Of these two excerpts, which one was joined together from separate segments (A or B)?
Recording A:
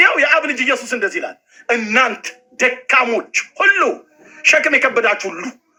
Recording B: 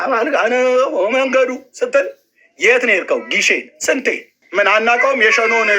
B